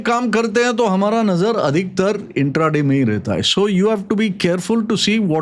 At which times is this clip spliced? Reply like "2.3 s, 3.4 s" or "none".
none